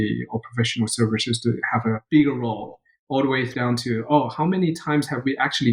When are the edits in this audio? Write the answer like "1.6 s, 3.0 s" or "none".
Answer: 2.0 s, 3.5 s